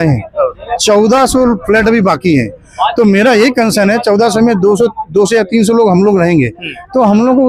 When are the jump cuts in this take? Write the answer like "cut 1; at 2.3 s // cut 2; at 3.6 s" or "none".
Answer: none